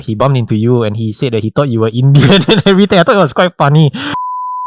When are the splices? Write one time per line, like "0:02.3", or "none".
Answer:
none